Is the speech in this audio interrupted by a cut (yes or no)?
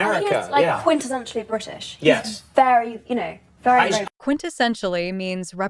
no